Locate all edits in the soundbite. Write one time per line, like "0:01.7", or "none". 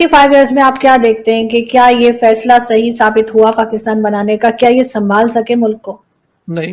none

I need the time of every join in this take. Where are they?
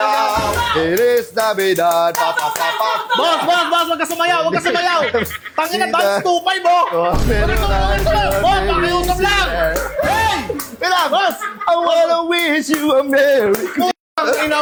none

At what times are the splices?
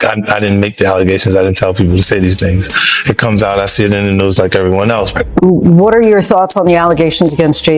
none

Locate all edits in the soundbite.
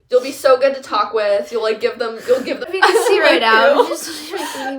0:02.7

